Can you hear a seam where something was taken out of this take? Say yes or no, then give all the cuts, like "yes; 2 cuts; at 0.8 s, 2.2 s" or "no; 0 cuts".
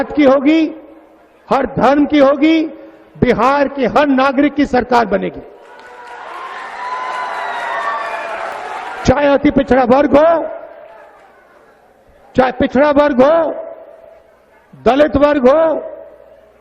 yes; 1 cut; at 8.5 s